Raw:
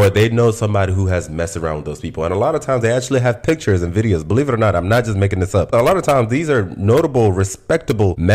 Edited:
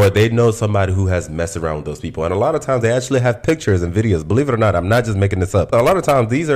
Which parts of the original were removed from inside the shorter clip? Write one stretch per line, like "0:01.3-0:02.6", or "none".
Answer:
none